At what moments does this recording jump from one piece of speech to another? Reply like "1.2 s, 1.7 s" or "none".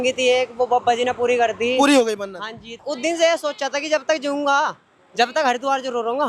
2.8 s